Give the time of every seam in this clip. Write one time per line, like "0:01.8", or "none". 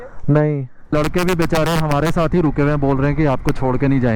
0:00.9